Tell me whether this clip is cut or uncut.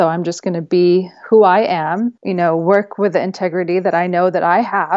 cut